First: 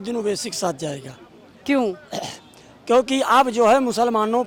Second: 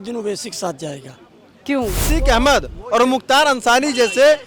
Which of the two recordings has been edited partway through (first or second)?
second